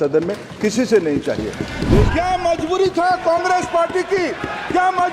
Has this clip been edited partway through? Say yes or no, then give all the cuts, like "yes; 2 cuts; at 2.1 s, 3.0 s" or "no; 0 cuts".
yes; 1 cut; at 1.8 s